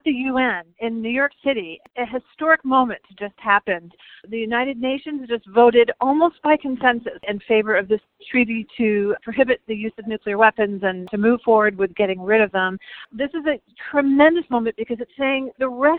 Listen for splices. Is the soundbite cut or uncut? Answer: cut